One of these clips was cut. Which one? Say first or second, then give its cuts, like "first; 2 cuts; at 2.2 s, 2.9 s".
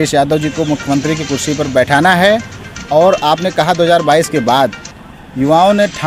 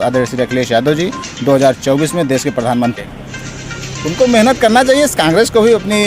second; 1 cut; at 3.0 s